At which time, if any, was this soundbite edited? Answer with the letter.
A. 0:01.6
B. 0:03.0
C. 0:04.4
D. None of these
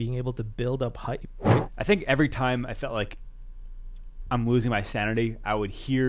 A